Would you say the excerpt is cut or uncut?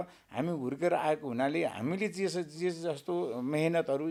uncut